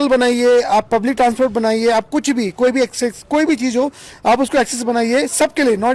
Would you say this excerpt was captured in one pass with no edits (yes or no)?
yes